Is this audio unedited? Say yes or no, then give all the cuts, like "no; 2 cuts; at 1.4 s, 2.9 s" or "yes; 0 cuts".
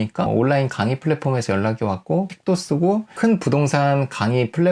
no; 1 cut; at 2.3 s